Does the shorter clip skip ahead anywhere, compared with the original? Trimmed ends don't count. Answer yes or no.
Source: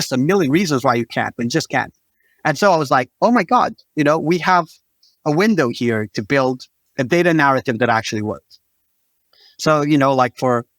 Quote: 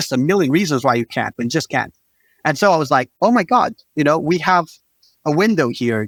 no